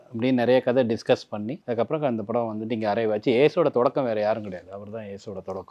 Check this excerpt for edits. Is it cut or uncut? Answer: cut